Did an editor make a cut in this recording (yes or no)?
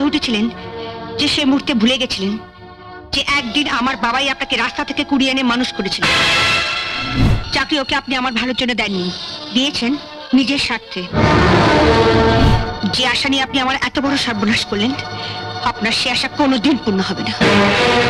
yes